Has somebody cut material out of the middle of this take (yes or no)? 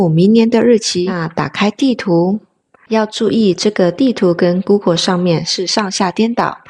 yes